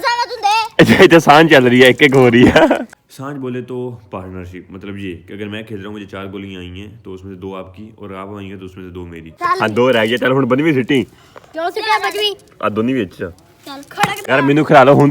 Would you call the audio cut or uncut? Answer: cut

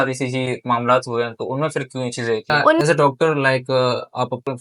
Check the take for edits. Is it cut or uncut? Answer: cut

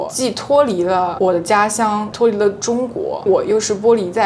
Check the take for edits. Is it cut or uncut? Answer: cut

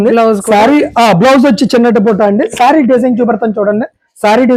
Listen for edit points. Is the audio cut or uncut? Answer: uncut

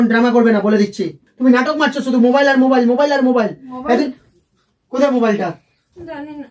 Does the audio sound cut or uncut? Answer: cut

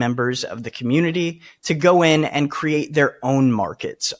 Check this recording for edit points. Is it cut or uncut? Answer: uncut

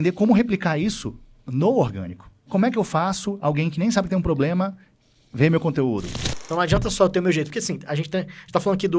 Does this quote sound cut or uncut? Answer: cut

